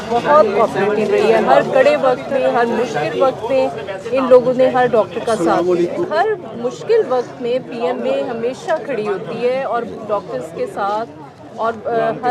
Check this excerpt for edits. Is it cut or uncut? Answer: cut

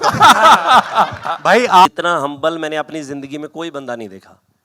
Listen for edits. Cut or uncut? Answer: cut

